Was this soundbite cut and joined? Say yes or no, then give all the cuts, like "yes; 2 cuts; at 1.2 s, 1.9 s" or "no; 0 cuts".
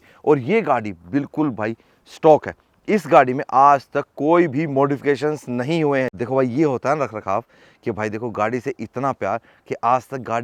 no; 0 cuts